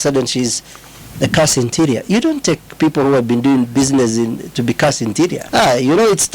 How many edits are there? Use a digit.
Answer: 1